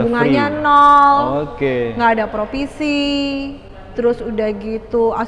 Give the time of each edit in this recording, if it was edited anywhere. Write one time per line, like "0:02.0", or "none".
none